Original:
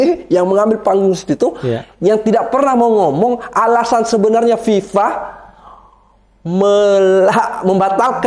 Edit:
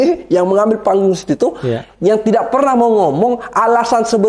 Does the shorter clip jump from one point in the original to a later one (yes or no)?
no